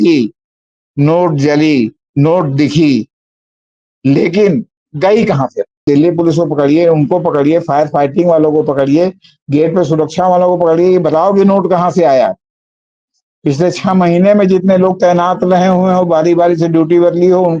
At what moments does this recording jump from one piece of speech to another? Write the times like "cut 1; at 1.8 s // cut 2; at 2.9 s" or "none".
cut 1; at 5.8 s